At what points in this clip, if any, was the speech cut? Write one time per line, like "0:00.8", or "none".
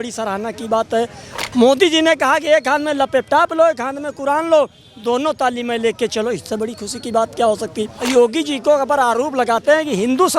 0:08.0